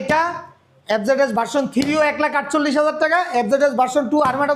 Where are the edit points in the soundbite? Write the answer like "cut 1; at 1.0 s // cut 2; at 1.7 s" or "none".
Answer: none